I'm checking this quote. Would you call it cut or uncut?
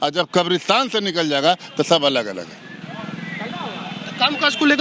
uncut